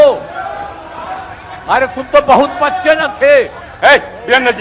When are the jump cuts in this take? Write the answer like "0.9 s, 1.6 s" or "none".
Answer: 3.6 s